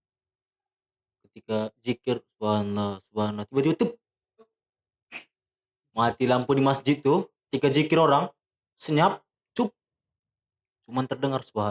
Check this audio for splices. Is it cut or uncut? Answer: uncut